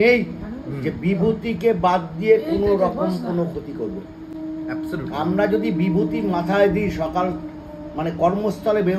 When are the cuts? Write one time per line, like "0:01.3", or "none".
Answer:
none